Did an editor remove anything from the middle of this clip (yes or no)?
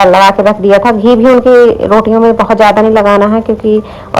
no